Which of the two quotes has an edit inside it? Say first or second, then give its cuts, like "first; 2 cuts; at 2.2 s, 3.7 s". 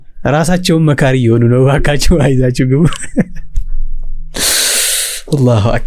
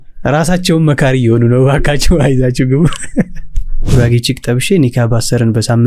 second; 1 cut; at 3.8 s